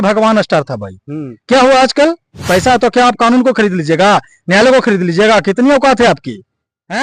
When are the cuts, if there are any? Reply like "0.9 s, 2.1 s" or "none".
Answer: 2.5 s